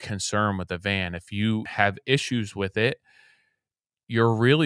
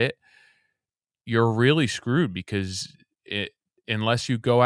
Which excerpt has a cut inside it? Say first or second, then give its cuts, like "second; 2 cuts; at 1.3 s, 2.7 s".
first; 1 cut; at 1.7 s